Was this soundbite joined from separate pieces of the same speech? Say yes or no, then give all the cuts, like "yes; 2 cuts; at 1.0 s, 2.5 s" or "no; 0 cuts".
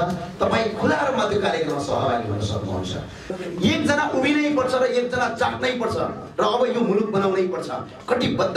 yes; 1 cut; at 3.2 s